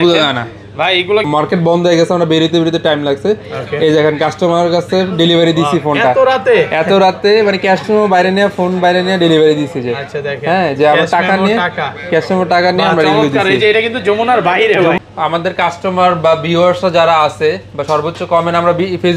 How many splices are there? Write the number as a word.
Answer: two